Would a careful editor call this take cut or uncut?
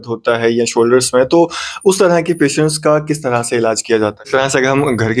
cut